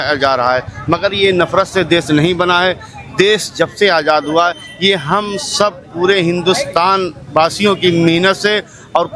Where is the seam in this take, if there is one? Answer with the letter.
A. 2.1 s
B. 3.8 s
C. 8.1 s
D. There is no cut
D